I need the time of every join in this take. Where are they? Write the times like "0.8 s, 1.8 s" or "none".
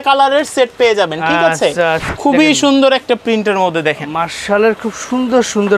2.1 s